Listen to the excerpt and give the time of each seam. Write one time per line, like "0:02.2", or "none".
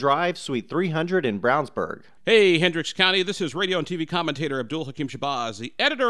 0:02.1